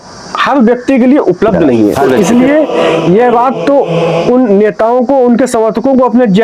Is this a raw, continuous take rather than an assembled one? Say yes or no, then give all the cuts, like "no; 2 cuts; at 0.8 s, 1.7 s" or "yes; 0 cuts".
no; 1 cut; at 2.2 s